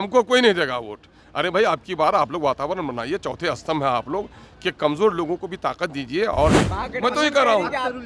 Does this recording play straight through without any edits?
no; 1 cut; at 6.6 s

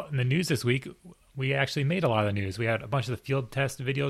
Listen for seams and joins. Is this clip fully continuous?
yes; 0 cuts

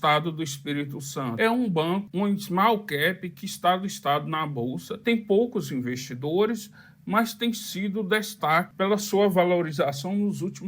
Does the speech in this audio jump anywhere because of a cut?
yes; 3 cuts; at 2.1 s, 4.9 s, 8.7 s

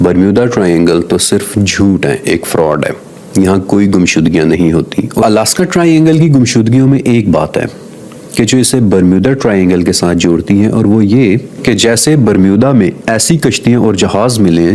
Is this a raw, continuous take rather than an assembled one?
no; 1 cut; at 5.2 s

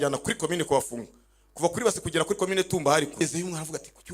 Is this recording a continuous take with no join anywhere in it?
no; 1 cut; at 3.2 s

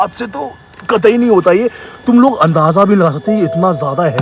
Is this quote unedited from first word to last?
yes; 0 cuts

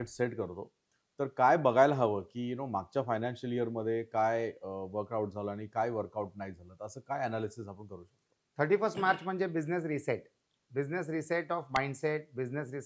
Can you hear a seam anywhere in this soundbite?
no; 0 cuts

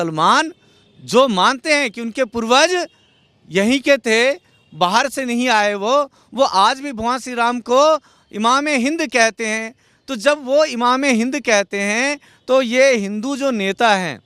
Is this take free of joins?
yes; 0 cuts

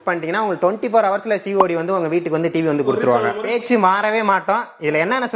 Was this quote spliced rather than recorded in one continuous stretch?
yes; 1 cut; at 3.6 s

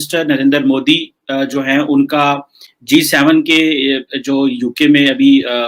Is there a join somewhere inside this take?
no; 0 cuts

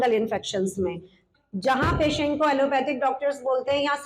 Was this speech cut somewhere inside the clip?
yes; 1 cut; at 1.2 s

